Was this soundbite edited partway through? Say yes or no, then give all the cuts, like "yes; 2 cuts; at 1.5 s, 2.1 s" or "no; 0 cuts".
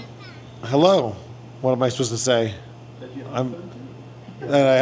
no; 0 cuts